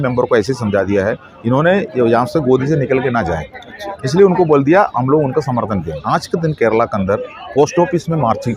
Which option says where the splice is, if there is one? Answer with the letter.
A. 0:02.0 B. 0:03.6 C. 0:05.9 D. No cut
C